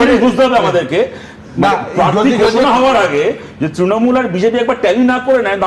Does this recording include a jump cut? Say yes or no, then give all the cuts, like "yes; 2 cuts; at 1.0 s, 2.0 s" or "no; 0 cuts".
no; 0 cuts